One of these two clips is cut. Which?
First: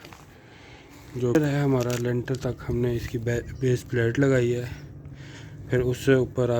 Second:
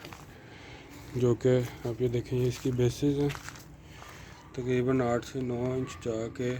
first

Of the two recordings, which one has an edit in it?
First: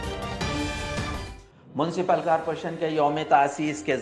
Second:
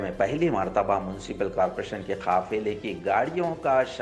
first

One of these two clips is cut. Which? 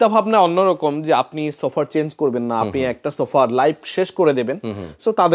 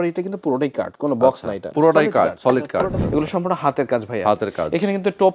second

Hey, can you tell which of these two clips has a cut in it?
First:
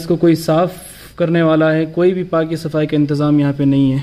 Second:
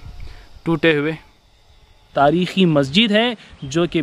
second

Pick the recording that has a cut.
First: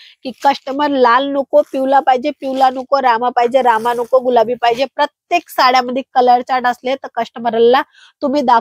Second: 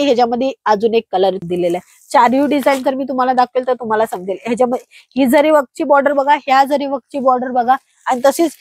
second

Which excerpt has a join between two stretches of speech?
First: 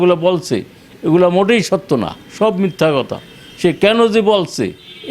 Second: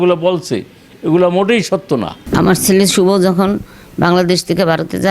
second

